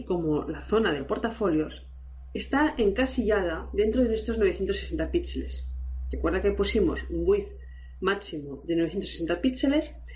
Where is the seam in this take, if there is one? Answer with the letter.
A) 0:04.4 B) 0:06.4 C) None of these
A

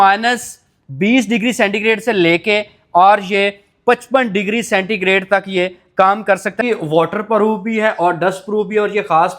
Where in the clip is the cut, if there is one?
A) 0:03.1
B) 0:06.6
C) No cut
B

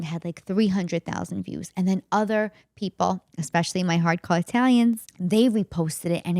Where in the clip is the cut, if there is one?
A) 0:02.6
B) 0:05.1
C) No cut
B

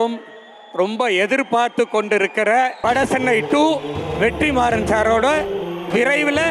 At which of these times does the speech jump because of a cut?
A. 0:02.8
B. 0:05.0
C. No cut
A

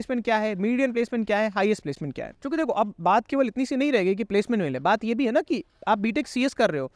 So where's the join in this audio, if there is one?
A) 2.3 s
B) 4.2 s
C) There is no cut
A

